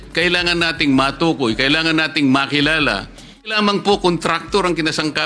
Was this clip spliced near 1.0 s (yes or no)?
no